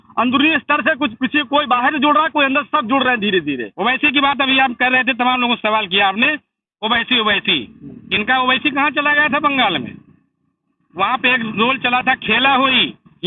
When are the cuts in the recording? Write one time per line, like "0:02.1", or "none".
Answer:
0:03.7

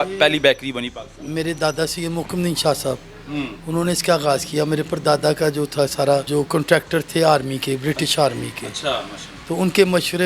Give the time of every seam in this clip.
0:06.3

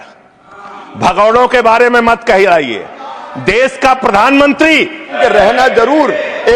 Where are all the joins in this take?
0:05.2

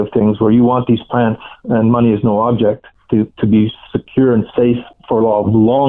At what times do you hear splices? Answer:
0:02.9
0:04.9

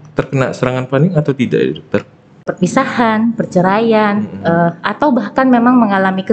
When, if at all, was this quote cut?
0:02.5

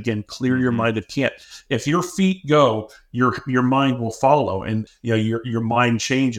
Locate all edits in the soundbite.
0:04.9

